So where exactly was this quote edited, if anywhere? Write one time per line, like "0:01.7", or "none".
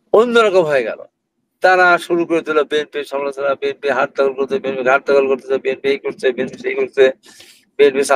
none